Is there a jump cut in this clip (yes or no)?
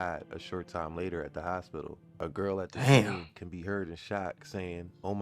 yes